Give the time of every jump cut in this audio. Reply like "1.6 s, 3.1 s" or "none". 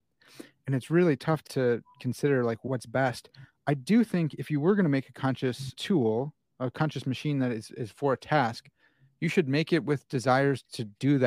1.4 s, 2.6 s, 5.7 s